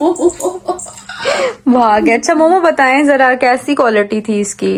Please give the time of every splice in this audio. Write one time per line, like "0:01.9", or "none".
none